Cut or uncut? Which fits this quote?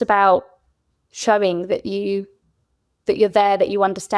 uncut